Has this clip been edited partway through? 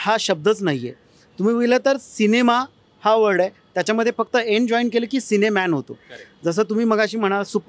no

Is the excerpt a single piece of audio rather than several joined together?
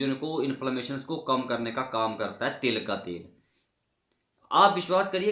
yes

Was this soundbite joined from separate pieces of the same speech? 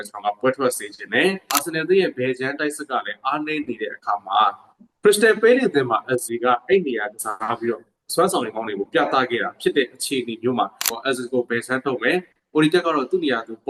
yes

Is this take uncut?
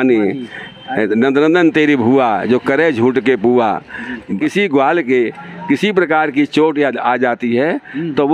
no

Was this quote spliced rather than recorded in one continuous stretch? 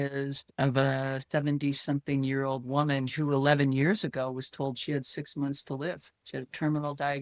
yes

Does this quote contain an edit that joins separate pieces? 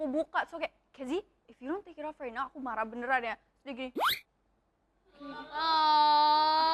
no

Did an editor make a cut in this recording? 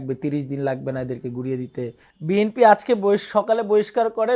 yes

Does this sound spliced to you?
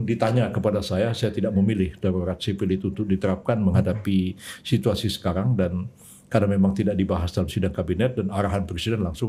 no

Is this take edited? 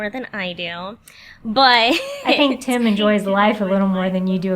yes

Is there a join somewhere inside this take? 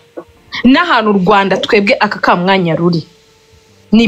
no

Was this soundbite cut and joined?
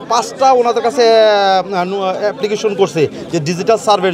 no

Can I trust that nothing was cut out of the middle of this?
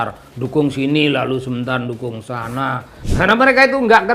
no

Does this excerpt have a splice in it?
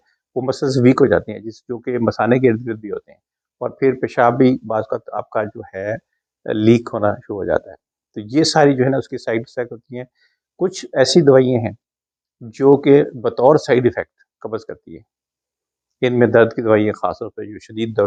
no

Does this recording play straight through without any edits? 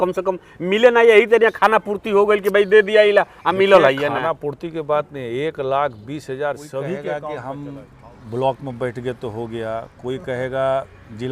no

